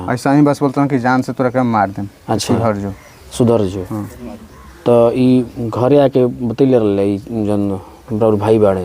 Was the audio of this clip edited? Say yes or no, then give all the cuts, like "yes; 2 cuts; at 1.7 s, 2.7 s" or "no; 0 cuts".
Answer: no; 0 cuts